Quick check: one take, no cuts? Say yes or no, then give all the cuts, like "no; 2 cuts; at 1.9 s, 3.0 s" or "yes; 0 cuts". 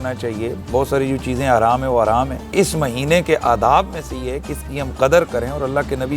no; 1 cut; at 2.4 s